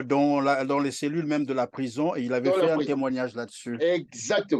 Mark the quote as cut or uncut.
uncut